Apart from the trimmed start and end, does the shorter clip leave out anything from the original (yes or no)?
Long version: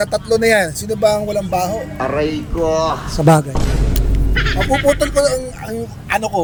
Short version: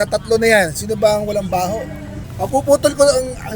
yes